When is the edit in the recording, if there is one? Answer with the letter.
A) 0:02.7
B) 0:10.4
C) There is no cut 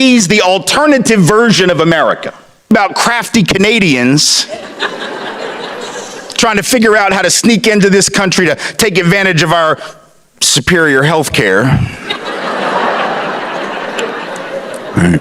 A